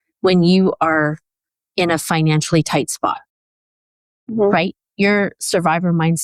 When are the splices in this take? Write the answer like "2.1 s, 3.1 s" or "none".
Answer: none